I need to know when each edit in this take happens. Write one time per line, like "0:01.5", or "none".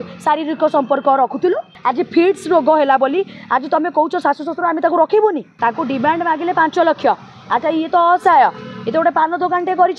0:01.7
0:05.5